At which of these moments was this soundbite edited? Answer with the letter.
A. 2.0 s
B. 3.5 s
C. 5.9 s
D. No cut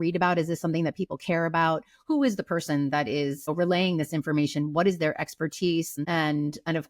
C